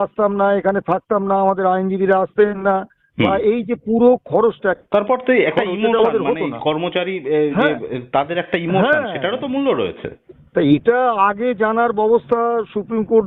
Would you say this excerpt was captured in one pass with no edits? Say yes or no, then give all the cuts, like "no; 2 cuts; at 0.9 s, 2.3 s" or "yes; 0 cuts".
yes; 0 cuts